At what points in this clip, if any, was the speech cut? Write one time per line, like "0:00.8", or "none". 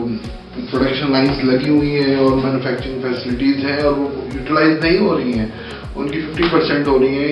none